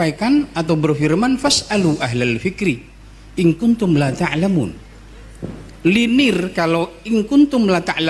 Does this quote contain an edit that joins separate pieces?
no; 0 cuts

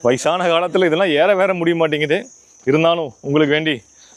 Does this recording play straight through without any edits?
yes; 0 cuts

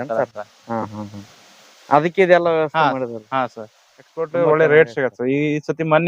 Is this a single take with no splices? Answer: no; 1 cut; at 4.3 s

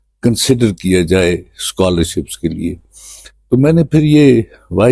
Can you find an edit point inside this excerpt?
no; 0 cuts

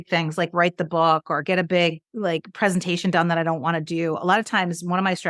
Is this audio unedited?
yes; 0 cuts

